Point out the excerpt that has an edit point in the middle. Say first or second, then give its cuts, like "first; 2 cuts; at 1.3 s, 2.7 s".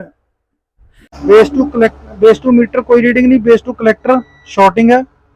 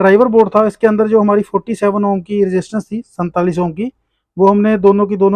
first; 1 cut; at 1.1 s